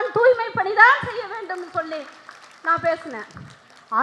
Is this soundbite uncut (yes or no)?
yes